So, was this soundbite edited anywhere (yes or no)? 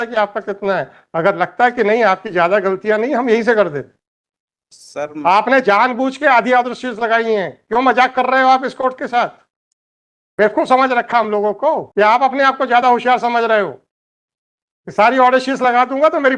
yes